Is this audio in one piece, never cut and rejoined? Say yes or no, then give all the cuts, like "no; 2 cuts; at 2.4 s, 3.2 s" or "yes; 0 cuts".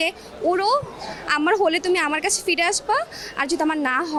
yes; 0 cuts